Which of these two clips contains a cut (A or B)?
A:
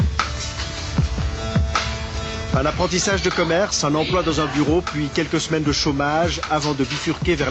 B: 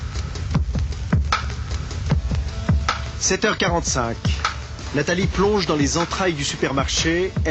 A